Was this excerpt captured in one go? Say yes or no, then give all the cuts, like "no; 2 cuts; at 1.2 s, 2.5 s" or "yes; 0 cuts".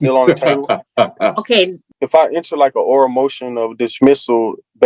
no; 1 cut; at 1.8 s